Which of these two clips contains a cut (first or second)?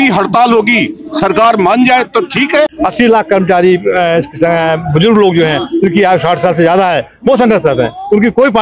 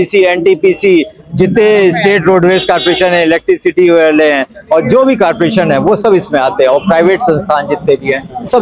first